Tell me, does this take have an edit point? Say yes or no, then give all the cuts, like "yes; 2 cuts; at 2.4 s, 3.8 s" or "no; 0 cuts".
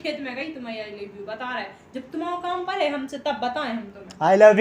no; 0 cuts